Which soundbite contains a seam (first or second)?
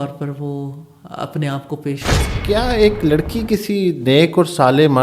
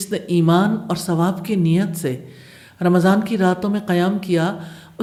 first